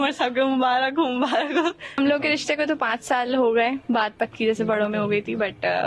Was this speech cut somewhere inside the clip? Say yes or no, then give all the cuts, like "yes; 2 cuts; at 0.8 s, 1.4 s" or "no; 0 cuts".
yes; 1 cut; at 2.0 s